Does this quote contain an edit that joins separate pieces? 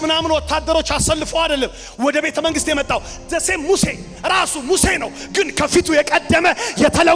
no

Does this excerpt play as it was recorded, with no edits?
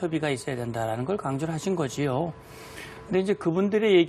no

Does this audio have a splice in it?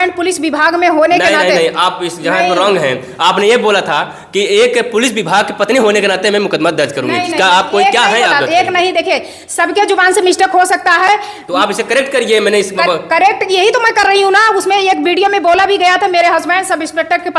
no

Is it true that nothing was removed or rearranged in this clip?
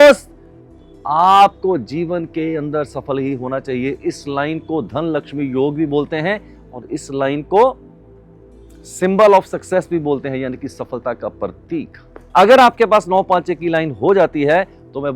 yes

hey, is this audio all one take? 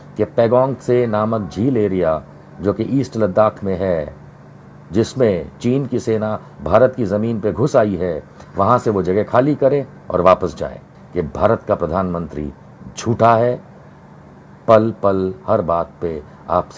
no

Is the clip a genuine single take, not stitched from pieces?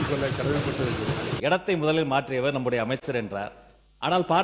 no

